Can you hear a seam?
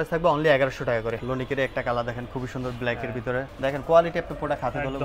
yes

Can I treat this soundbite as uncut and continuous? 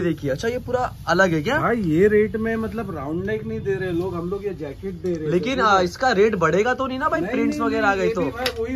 yes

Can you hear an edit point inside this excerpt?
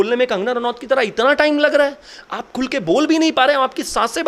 no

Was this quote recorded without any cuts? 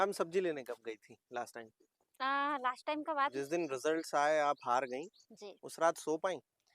no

